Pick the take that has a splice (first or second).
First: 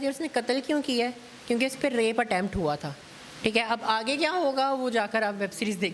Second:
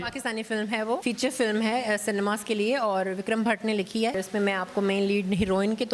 second